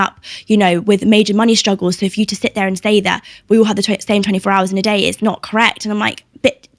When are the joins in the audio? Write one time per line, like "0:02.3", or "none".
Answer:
none